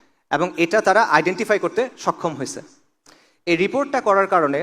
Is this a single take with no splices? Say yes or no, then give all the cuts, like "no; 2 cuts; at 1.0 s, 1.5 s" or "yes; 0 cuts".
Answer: yes; 0 cuts